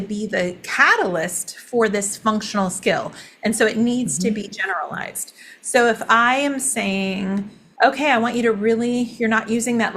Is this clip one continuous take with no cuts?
no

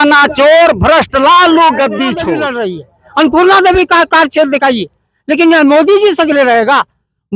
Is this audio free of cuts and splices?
no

